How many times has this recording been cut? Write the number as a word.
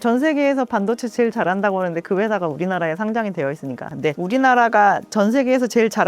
one